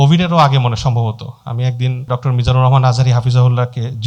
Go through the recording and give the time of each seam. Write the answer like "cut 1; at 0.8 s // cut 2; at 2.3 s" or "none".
cut 1; at 2.1 s